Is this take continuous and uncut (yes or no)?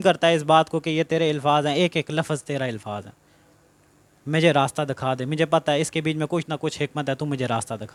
yes